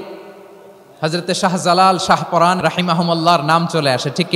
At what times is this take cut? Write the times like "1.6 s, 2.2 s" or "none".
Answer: 2.6 s